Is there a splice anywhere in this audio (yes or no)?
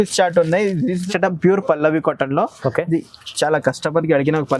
yes